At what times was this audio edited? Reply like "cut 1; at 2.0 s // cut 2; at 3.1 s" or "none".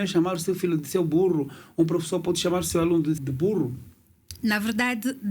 cut 1; at 3.3 s

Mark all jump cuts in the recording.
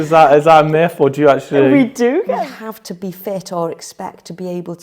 cut 1; at 2.3 s

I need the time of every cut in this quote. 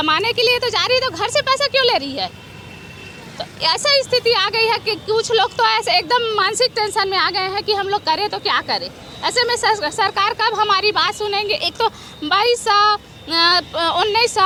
none

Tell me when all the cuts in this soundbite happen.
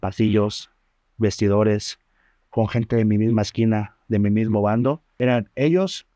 cut 1; at 5.1 s

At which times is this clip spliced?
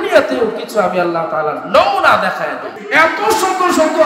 cut 1; at 2.7 s

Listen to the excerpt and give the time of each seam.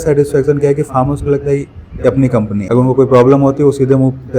cut 1; at 2.6 s

